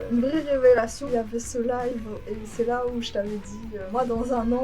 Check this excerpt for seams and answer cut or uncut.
cut